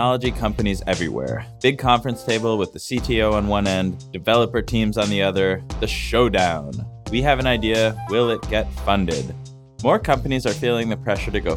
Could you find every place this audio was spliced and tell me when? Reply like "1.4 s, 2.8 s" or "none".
4.1 s